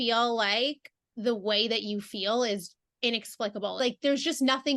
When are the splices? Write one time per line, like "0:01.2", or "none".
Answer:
0:03.8